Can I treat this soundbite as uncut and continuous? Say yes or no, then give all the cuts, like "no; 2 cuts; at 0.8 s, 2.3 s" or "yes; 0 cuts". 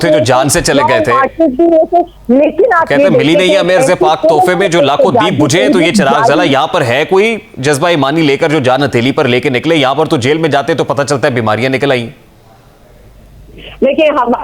yes; 0 cuts